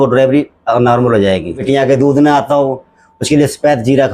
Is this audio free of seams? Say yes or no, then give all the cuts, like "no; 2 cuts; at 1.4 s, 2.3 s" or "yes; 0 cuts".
no; 1 cut; at 1.6 s